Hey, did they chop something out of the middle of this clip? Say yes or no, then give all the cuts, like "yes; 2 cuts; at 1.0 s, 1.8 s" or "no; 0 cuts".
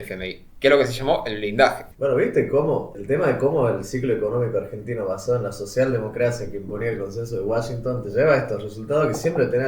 yes; 2 cuts; at 1.9 s, 2.9 s